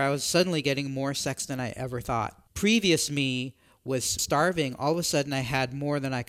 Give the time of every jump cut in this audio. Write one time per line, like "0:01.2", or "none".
0:02.4
0:04.2

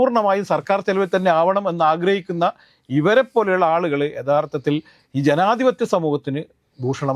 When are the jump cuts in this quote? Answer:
none

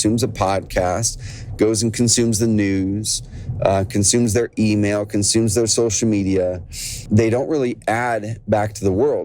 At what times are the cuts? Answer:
0:07.0

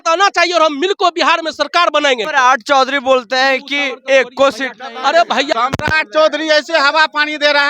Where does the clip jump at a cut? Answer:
0:02.2
0:05.5

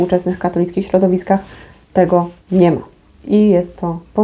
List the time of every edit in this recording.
none

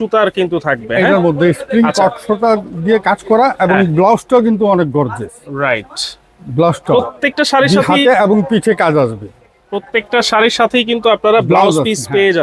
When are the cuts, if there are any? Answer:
none

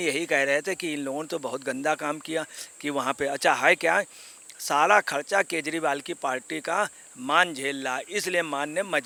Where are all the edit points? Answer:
none

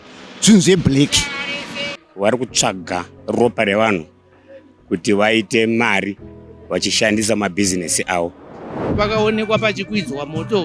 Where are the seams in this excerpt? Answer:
0:02.0
0:08.9

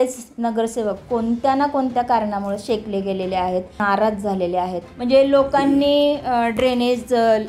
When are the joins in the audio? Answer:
0:03.8
0:04.9

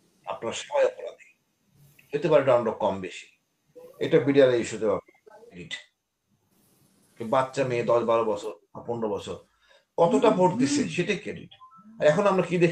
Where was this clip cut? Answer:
0:05.6

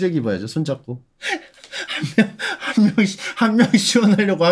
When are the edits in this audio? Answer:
none

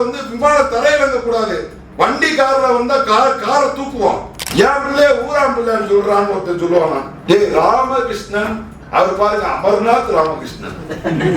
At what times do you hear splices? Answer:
0:04.4
0:07.1

